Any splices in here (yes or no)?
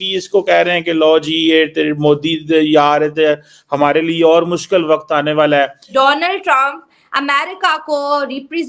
yes